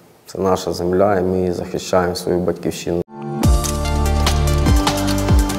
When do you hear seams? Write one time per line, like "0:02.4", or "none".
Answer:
0:03.1